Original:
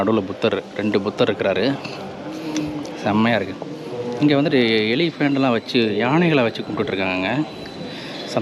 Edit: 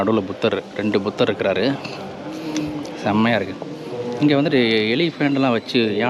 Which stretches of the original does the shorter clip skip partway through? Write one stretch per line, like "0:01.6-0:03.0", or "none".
none